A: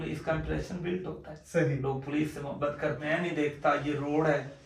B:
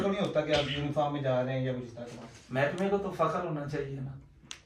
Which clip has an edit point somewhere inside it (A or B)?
A